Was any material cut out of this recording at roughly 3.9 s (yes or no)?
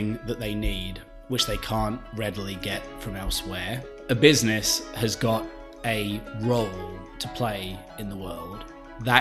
yes